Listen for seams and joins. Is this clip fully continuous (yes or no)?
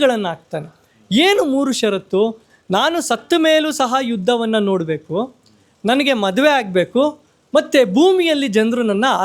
yes